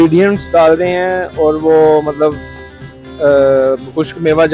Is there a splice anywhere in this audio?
no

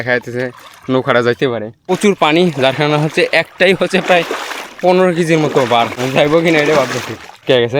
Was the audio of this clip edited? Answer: yes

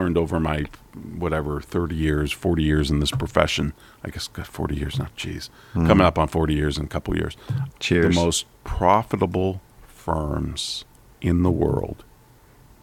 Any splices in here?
no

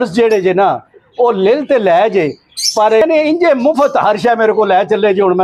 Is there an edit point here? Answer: no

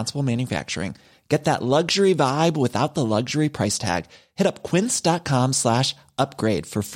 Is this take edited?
no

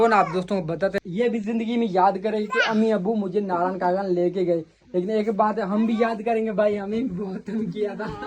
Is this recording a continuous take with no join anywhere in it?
no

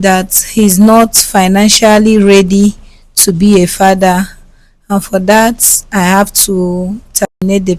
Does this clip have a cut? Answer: no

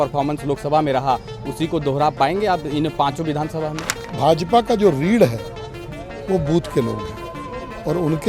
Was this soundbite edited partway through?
yes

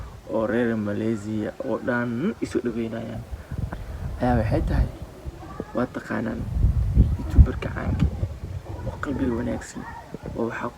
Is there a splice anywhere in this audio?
yes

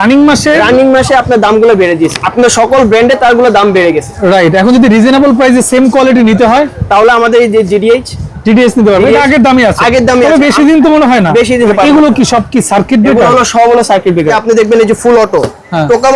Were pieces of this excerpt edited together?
yes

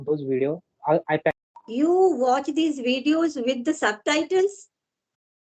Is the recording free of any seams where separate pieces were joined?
no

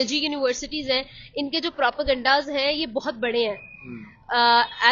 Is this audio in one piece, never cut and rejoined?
yes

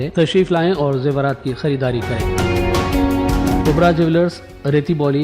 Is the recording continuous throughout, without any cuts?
no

